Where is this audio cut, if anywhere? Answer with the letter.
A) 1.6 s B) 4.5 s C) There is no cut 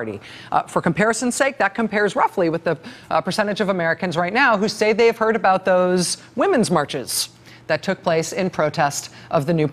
A